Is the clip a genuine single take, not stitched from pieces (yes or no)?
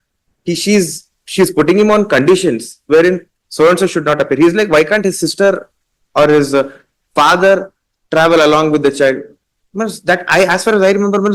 yes